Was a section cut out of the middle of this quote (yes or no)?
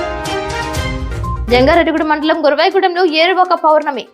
yes